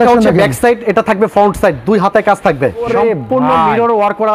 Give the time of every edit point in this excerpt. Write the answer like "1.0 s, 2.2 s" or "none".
2.8 s